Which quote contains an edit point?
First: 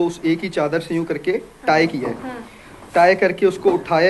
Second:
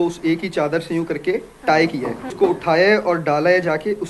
second; 1 cut; at 2.3 s

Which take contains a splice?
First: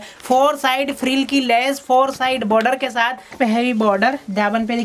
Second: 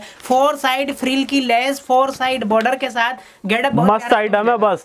first; 1 cut; at 3.3 s

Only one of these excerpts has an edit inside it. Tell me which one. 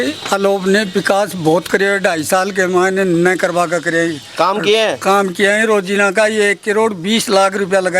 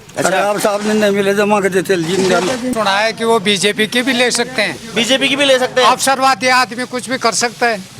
second; 1 cut; at 2.7 s

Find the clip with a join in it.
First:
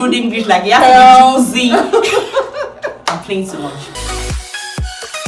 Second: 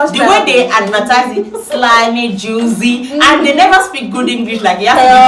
first; 1 cut; at 3.9 s

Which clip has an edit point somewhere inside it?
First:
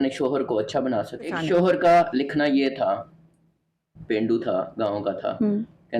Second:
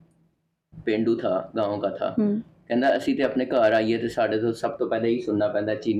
first; 1 cut; at 1.4 s

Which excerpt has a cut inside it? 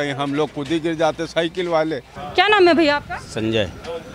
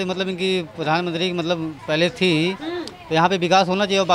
first; 1 cut; at 2.1 s

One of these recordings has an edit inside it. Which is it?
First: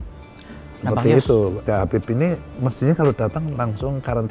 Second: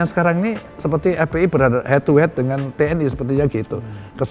first; 1 cut; at 1.6 s

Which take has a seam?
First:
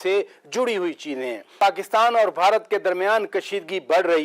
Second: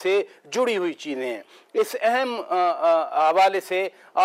first; 1 cut; at 1.5 s

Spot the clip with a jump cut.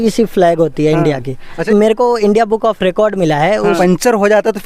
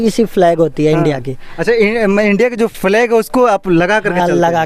first; 2 cuts; at 1.6 s, 3.8 s

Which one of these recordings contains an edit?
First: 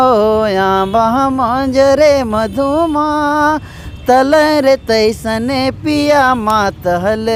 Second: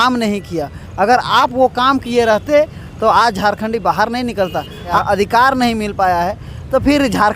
second; 1 cut; at 5.0 s

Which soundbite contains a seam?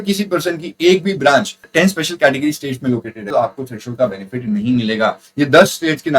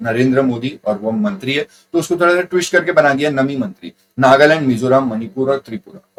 first; 3 cuts; at 1.7 s, 3.2 s, 5.2 s

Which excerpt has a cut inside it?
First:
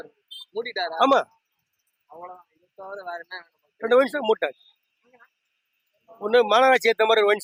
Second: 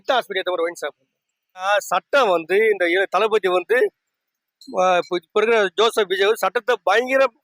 second; 1 cut; at 1.7 s

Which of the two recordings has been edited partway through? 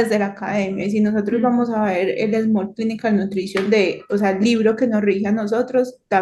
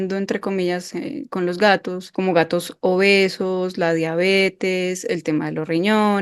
second; 1 cut; at 2.0 s

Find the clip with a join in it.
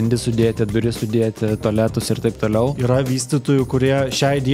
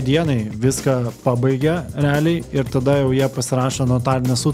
first; 1 cut; at 2.8 s

